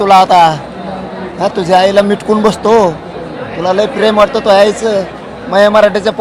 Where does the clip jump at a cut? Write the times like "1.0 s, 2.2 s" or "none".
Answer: none